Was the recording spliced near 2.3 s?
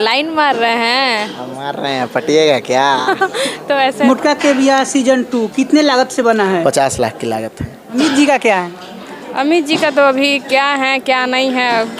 no; 2 cuts; at 4.0 s, 7.8 s

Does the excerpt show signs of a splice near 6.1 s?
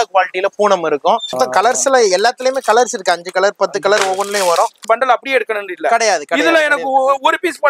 no; 2 cuts; at 1.3 s, 4.8 s

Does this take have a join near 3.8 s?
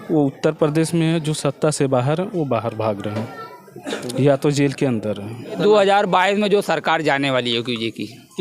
no; 1 cut; at 5.6 s

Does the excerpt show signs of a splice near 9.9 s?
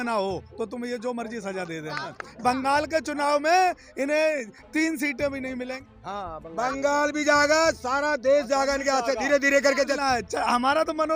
yes; 3 cuts; at 2.1 s, 5.8 s, 9.9 s

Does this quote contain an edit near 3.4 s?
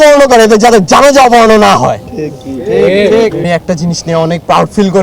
yes; 1 cut; at 3.4 s

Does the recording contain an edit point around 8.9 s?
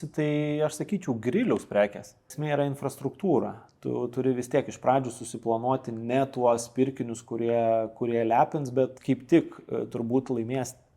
yes; 2 cuts; at 2.3 s, 8.9 s

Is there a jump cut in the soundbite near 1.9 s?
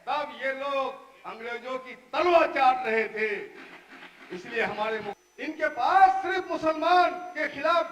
no; 1 cut; at 5.2 s

